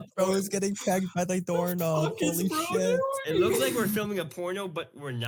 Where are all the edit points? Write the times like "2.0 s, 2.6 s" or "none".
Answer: none